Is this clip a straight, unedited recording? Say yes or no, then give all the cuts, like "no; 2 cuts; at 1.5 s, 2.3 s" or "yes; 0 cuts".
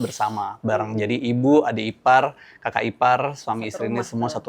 yes; 0 cuts